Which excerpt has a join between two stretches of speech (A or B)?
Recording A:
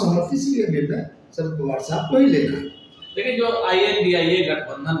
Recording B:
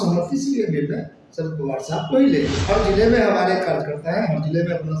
B